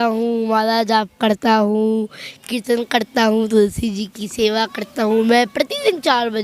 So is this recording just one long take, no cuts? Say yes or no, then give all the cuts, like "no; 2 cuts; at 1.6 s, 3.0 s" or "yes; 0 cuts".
yes; 0 cuts